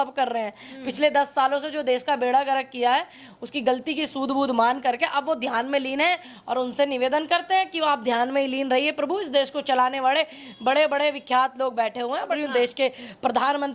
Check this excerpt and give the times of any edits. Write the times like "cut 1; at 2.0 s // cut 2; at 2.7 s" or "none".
cut 1; at 12.3 s